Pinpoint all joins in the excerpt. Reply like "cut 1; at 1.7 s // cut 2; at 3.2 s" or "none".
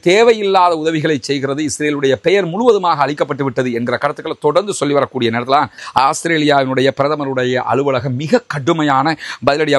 cut 1; at 5.8 s